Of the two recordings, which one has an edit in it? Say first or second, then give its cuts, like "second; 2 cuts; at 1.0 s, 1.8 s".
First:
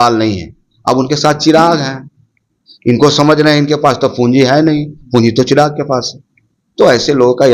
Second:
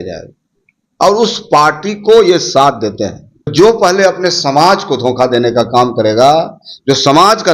second; 1 cut; at 3.5 s